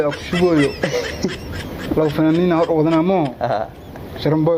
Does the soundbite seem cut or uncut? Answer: uncut